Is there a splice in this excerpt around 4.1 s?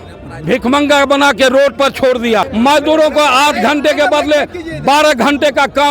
no; 1 cut; at 2.5 s

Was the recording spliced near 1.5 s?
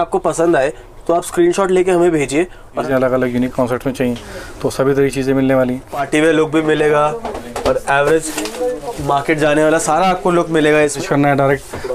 no; 3 cuts; at 2.8 s, 6.0 s, 11.0 s

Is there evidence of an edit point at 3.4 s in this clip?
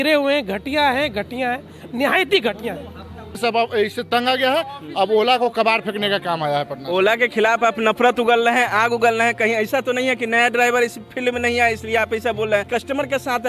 yes; 2 cuts; at 3.4 s, 12.7 s

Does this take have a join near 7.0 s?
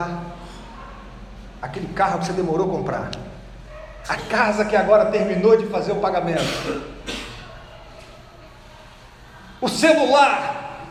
no; 0 cuts

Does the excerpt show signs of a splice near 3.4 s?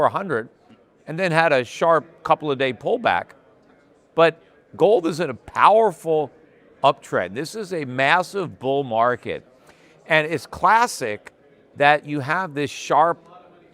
no; 0 cuts

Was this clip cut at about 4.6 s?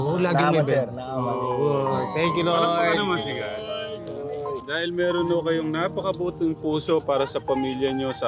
yes; 1 cut; at 4.6 s

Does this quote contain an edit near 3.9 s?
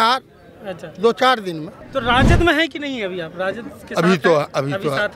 no; 1 cut; at 1.8 s

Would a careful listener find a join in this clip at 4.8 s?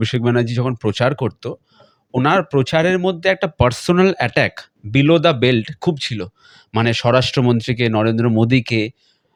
no; 0 cuts

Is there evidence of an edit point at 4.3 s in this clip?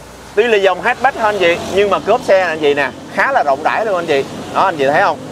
no; 0 cuts

